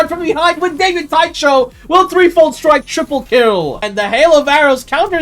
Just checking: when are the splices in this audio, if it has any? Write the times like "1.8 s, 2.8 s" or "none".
3.9 s